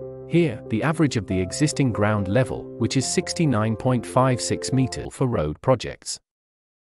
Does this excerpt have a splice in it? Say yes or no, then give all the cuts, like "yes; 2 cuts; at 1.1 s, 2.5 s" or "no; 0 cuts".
yes; 1 cut; at 5.1 s